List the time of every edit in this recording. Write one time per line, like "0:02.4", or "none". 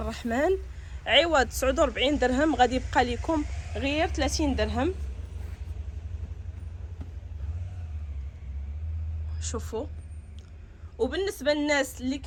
none